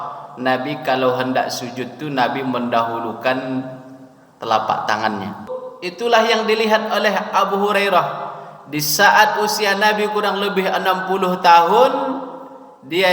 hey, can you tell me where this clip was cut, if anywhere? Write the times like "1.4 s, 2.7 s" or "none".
5.5 s